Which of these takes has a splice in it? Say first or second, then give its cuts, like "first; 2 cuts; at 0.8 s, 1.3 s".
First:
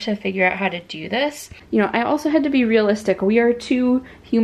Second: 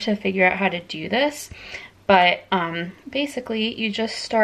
first; 1 cut; at 1.6 s